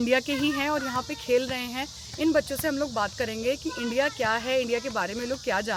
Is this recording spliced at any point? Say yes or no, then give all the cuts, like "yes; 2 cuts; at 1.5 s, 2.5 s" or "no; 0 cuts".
no; 0 cuts